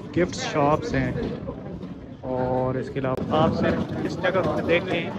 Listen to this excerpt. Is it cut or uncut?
cut